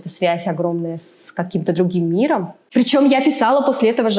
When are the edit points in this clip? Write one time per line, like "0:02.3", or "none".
0:02.6